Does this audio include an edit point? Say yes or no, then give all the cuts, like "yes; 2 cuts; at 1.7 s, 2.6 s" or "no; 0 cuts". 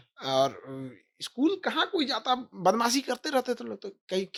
no; 0 cuts